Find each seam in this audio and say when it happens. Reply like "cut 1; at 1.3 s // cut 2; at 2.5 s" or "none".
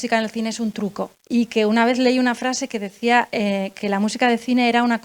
cut 1; at 1.2 s